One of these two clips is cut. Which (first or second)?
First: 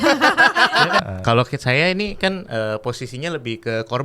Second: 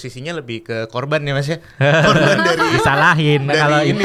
first